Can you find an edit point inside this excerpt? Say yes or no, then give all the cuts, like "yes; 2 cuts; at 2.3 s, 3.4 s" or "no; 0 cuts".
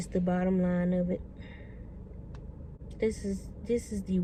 no; 0 cuts